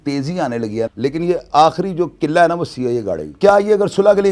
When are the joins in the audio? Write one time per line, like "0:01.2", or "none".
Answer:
0:00.9
0:03.4